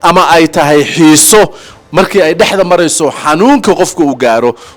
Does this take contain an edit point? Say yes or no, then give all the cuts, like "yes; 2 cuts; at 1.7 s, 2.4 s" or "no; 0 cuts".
no; 0 cuts